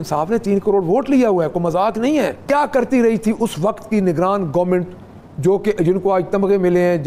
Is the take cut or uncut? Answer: cut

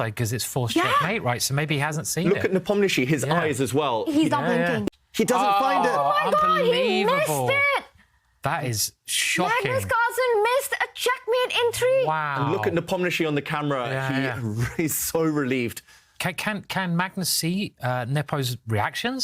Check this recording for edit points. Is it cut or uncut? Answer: cut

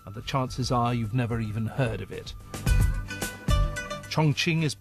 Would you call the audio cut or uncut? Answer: cut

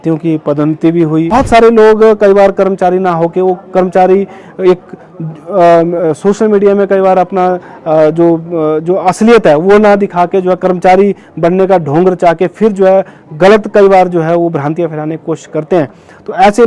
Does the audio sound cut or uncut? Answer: cut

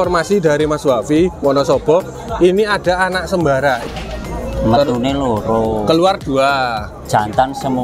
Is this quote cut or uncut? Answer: cut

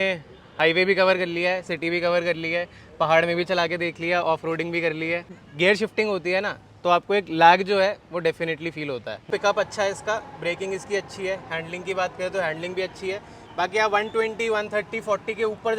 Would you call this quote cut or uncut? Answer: cut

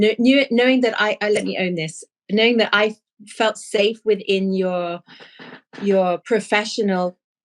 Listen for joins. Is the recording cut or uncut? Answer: uncut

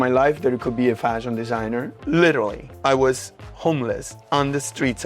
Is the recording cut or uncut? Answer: cut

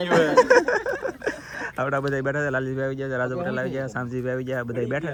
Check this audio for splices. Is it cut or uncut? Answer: uncut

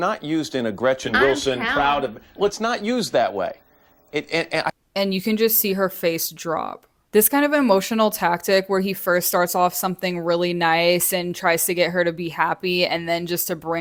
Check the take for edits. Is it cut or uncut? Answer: uncut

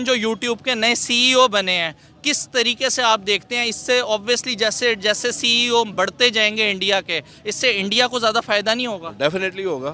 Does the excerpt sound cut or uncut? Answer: uncut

